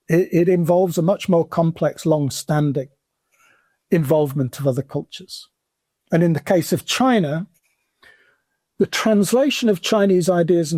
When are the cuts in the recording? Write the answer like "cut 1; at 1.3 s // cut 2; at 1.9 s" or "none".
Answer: none